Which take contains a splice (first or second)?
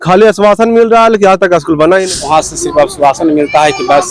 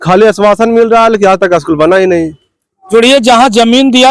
first